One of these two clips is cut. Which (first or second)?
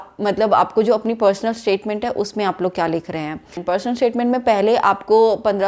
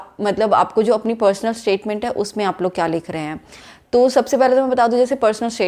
first